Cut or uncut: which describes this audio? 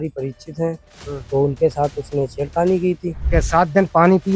cut